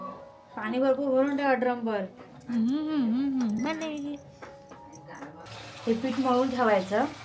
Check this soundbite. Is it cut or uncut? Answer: cut